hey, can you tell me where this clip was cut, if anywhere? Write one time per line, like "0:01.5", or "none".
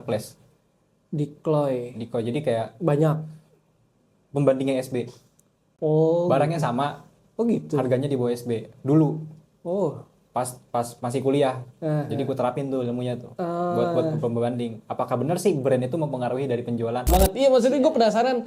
0:17.1